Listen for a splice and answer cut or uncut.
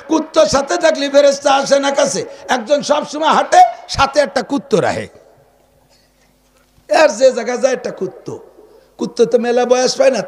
uncut